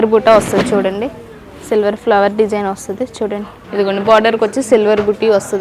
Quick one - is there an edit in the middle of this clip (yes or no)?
yes